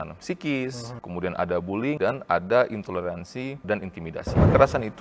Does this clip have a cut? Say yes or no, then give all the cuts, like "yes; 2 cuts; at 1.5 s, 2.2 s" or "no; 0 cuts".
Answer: yes; 3 cuts; at 0.9 s, 2.0 s, 3.9 s